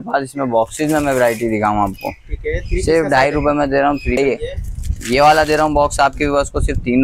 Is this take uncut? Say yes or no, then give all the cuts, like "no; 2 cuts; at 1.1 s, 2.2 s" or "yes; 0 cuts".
no; 1 cut; at 4.2 s